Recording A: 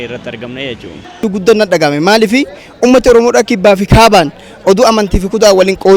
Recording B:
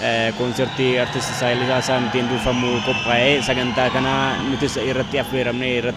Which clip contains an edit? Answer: A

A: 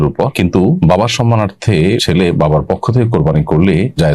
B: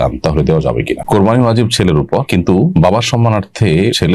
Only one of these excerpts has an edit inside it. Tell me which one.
B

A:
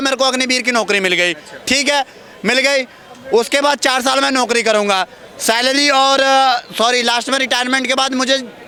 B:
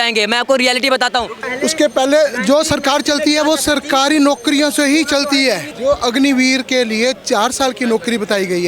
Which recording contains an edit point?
B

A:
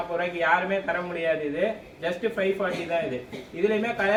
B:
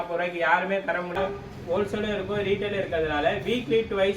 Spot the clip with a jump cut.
B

